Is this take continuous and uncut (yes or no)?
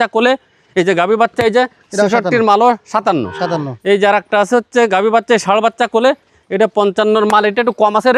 yes